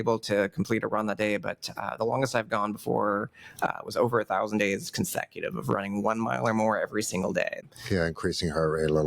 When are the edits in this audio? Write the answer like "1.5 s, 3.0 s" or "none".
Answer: 7.6 s